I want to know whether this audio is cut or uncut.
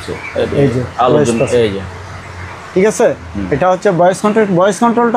uncut